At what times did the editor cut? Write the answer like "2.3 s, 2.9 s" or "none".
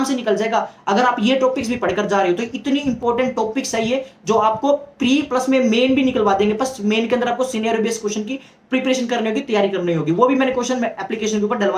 none